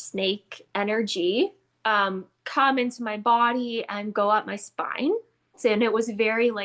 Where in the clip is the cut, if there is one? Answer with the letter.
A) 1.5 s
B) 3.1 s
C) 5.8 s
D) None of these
C